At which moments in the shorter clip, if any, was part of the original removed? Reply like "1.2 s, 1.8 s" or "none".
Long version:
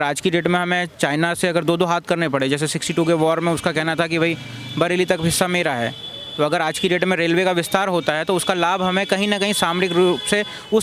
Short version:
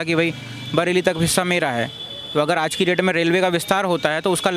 none